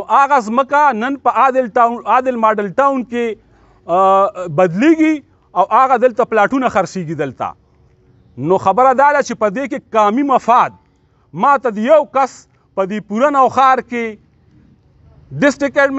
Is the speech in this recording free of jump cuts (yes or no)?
yes